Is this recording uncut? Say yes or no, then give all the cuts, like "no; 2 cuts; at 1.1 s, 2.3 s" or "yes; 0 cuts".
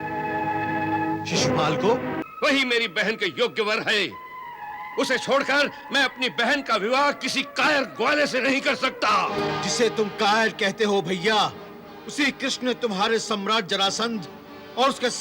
no; 1 cut; at 2.2 s